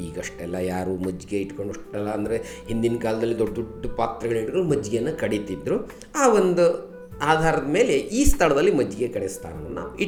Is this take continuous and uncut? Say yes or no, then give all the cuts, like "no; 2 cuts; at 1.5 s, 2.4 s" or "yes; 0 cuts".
yes; 0 cuts